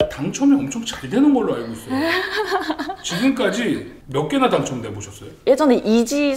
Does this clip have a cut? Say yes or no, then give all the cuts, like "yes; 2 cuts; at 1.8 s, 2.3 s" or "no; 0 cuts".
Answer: yes; 1 cut; at 5.3 s